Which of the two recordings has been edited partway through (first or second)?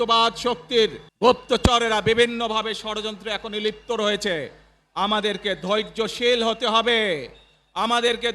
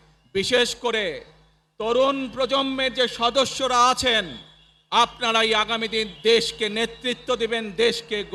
first